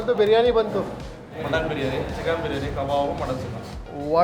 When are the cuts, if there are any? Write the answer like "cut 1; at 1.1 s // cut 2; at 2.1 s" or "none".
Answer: cut 1; at 1.3 s